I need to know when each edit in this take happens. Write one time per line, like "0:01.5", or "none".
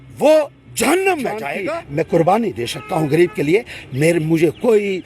0:01.5